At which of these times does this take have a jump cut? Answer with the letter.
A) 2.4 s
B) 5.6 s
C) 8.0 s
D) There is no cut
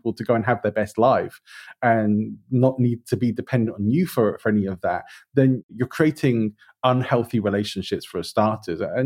B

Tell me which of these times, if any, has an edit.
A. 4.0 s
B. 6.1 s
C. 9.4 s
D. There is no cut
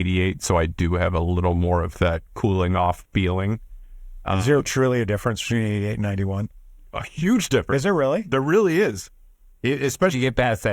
D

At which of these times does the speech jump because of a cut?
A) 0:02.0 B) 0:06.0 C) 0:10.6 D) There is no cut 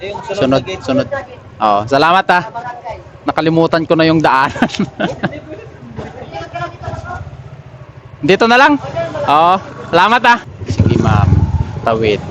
C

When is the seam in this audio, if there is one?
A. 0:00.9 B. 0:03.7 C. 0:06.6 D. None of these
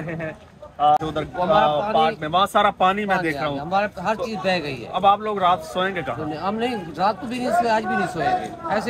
A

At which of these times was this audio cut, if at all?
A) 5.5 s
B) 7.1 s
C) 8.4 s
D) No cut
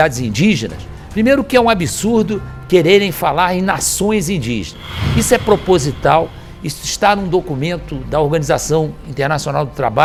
D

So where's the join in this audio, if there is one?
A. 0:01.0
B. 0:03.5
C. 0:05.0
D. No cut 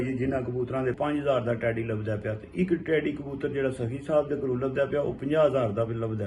A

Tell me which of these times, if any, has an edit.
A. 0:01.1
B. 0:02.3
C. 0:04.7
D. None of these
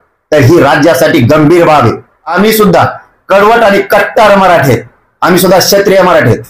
B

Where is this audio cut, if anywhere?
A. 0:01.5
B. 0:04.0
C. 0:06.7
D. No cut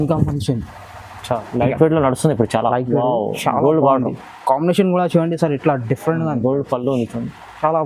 A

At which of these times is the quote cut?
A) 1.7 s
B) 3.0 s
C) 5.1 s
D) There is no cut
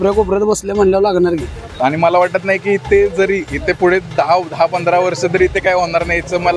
A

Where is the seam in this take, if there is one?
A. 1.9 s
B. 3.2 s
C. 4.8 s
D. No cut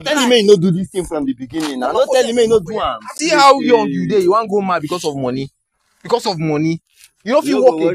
B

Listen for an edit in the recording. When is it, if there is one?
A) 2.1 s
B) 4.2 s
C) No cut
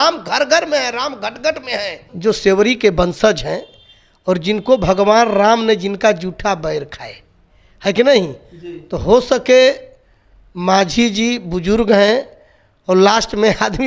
A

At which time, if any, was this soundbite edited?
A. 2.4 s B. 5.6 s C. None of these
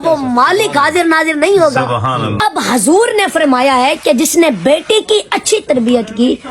A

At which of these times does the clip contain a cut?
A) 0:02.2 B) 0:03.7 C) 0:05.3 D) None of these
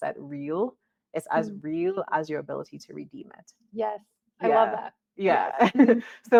D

